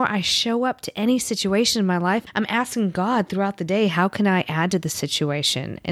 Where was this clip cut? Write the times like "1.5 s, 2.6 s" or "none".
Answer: 2.2 s